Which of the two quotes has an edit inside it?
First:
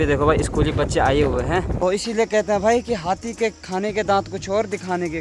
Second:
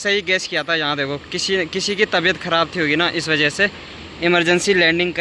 first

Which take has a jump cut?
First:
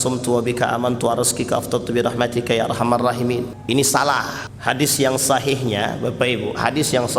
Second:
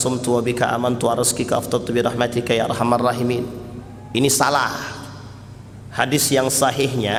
first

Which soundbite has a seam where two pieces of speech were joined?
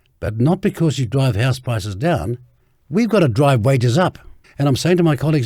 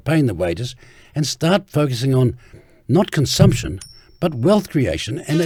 first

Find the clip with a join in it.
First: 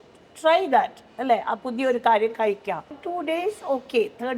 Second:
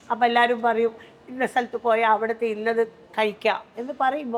first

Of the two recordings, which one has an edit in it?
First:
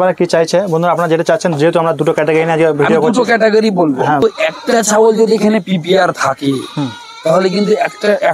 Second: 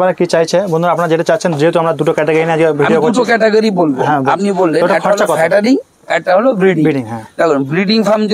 first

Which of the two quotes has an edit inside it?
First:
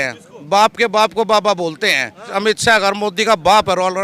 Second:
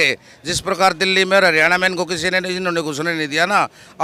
first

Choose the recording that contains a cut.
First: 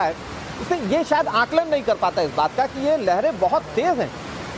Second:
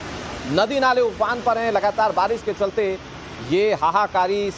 second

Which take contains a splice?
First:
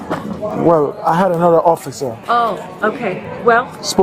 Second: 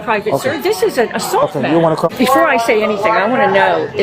second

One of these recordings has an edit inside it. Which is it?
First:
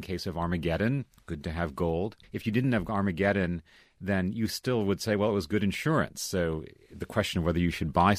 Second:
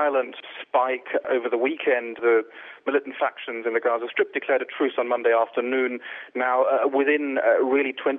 first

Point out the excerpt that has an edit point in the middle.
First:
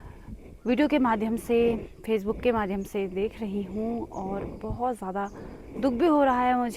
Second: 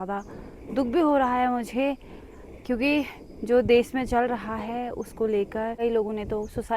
second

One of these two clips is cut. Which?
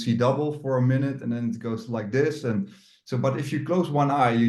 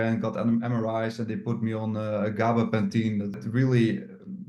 second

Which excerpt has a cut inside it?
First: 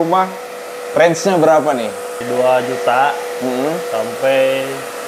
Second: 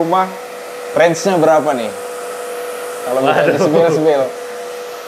first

